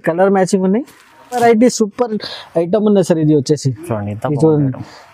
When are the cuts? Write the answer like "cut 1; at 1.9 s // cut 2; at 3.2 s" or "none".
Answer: cut 1; at 1.4 s